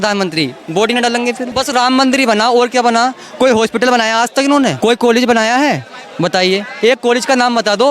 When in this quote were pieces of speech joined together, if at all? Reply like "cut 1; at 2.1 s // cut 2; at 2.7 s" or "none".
cut 1; at 1.5 s // cut 2; at 4.8 s